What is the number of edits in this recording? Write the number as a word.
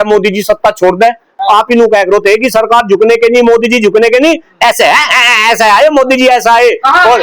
one